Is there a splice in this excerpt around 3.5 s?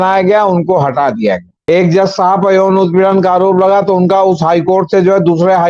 no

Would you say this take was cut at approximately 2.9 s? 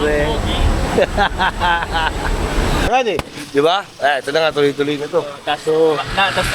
yes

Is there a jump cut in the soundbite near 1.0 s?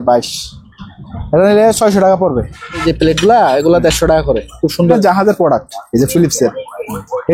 no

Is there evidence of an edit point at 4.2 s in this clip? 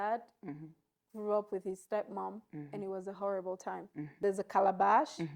yes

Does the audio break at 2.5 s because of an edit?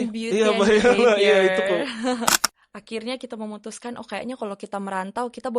yes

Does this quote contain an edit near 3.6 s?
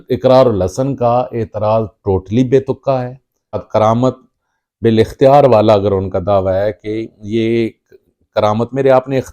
yes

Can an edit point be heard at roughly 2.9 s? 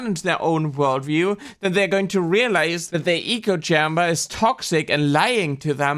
yes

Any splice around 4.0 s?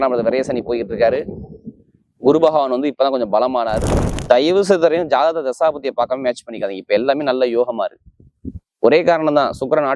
yes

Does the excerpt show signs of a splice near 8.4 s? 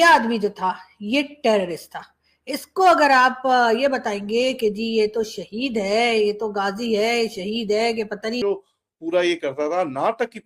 yes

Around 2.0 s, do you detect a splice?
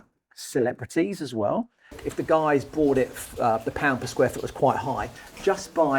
yes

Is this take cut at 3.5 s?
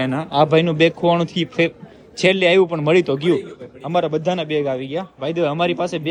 no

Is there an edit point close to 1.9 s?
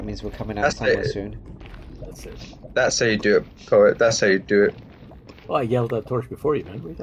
no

